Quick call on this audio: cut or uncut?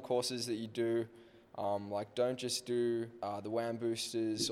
cut